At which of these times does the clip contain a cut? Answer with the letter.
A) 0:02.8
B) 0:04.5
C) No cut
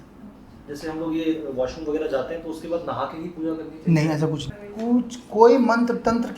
B